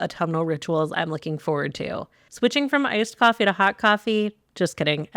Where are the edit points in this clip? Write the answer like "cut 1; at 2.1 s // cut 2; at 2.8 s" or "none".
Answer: cut 1; at 2.3 s